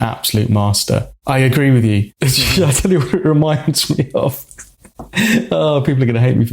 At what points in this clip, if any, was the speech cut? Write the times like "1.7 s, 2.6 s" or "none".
1.1 s, 2.1 s